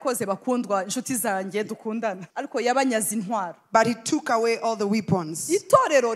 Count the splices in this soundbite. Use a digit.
1